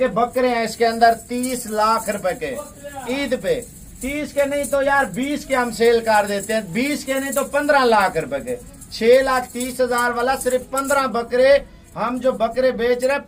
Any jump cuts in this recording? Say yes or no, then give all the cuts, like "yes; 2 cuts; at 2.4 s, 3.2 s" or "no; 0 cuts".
no; 0 cuts